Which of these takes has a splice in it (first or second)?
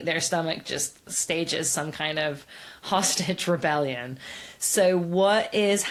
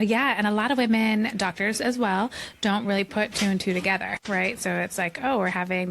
second